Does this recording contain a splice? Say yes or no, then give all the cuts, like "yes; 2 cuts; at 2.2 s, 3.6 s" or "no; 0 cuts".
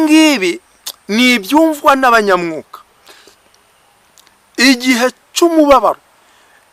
no; 0 cuts